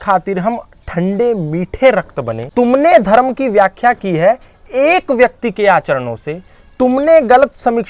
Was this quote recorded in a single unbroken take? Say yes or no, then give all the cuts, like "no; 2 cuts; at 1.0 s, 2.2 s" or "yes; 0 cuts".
no; 1 cut; at 2.4 s